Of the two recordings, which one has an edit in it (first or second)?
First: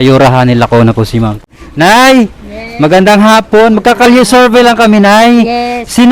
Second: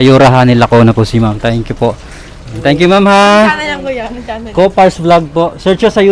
first